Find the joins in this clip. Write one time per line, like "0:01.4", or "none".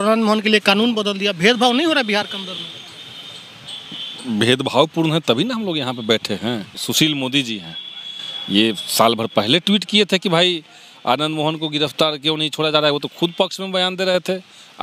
0:06.8

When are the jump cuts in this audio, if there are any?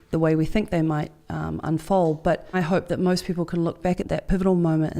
0:02.5
0:04.0

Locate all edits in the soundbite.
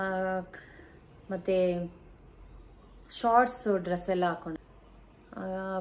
0:04.6

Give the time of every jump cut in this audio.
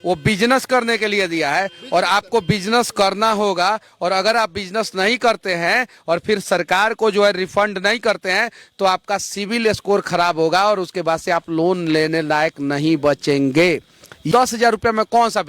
0:14.4

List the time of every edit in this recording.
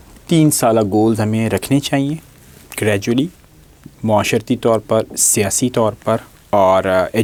none

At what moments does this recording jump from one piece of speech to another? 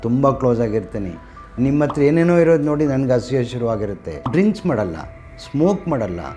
0:04.1

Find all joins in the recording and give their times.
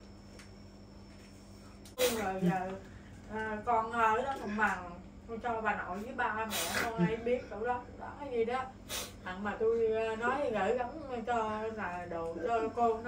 0:02.0

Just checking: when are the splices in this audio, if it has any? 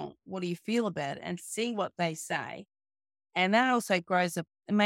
none

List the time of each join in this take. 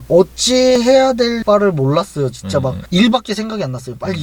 none

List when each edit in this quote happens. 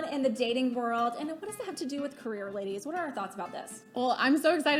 none

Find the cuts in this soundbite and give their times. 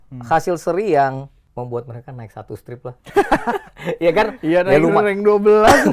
0:01.4

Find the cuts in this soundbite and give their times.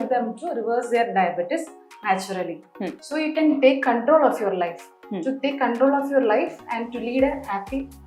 none

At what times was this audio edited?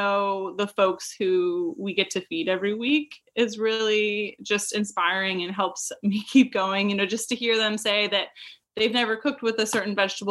none

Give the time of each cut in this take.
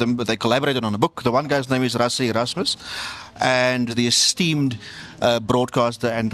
0:03.9

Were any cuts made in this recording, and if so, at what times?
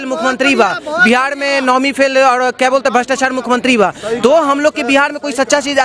none

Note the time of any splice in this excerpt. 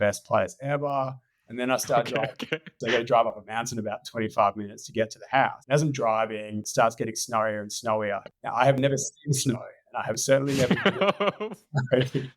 0:02.7
0:05.6
0:06.7
0:08.3

